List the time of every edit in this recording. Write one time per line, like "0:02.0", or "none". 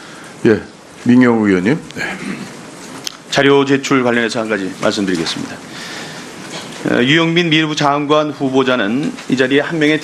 none